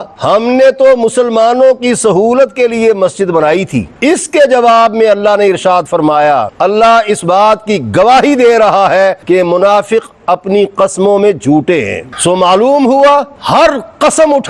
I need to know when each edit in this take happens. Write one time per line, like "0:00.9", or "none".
0:03.9
0:06.5

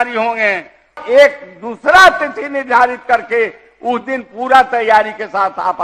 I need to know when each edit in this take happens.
0:01.0

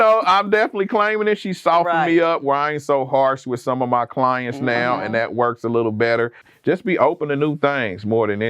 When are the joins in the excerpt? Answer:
0:06.5

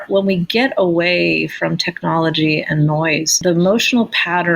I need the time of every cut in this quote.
0:03.4

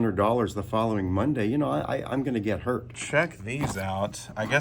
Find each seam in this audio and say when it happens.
0:02.9

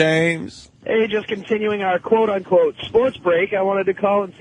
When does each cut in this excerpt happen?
none

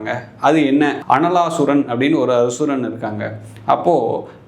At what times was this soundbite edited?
0:01.0

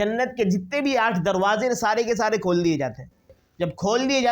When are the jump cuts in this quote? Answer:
0:03.4

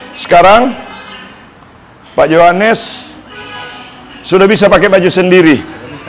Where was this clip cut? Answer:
none

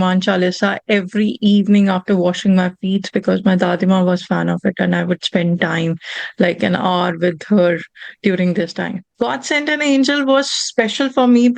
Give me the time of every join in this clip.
0:09.0

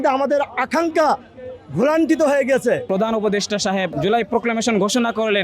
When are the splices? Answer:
0:02.8
0:03.9

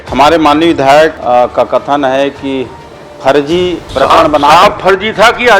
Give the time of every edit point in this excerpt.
0:01.2

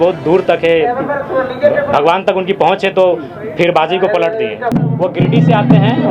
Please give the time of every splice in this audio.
0:04.7

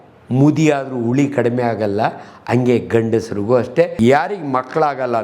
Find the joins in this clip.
0:03.9

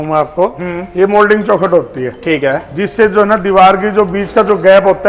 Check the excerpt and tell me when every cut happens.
none

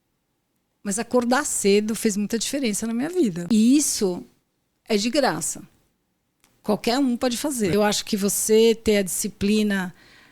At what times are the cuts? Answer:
0:03.4
0:07.7

